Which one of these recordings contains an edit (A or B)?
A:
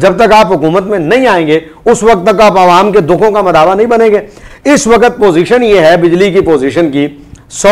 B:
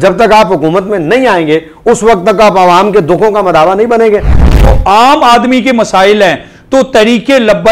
B